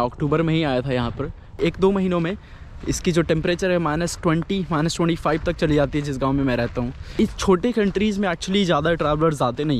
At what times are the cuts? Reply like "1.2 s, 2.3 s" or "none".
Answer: 1.4 s, 7.1 s